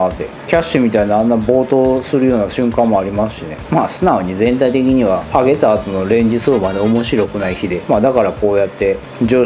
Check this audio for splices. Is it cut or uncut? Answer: cut